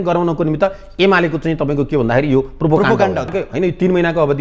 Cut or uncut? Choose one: cut